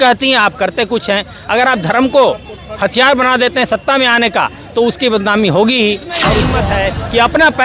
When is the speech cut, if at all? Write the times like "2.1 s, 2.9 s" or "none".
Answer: 6.4 s

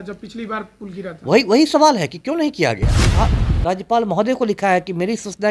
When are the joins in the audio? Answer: 3.1 s

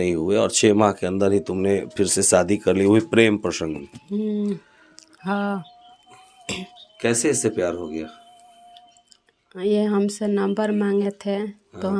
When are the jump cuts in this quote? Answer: none

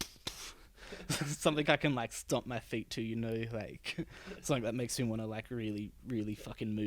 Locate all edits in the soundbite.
none

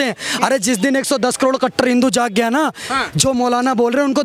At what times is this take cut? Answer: none

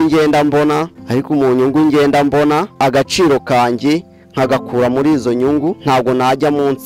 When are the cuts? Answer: 1.0 s, 2.7 s, 5.8 s

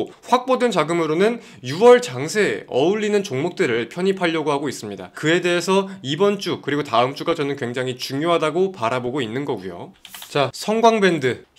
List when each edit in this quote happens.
9.8 s

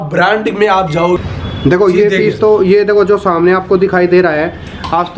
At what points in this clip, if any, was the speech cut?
1.2 s

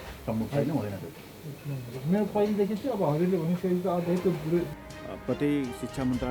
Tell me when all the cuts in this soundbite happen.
4.8 s

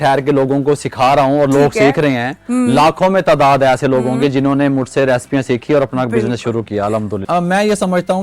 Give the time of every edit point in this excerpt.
7.2 s

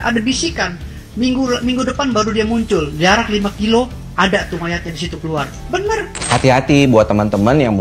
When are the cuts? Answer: none

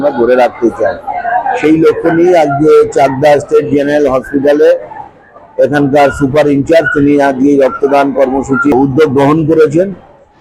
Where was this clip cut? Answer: 8.7 s

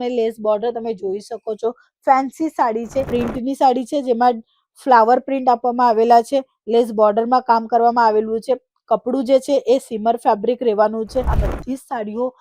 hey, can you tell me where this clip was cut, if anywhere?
3.1 s, 11.3 s

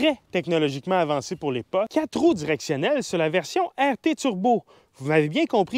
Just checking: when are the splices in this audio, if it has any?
1.9 s

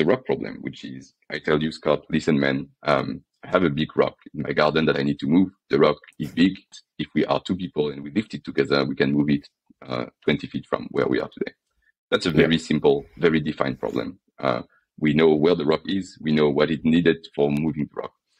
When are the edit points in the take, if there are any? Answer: 6.8 s

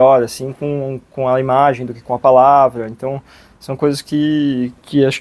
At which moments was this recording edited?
none

